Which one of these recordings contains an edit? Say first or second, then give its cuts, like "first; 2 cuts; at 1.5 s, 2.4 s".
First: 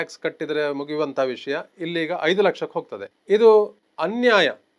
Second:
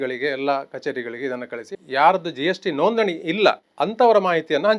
second; 2 cuts; at 1.6 s, 3.7 s